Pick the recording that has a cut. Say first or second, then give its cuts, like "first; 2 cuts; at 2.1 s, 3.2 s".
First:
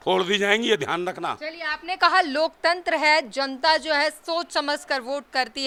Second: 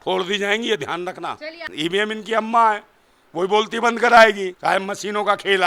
second; 2 cuts; at 1.7 s, 4.5 s